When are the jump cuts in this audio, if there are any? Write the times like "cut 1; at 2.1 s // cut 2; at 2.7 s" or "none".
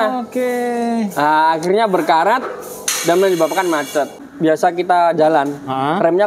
cut 1; at 4.2 s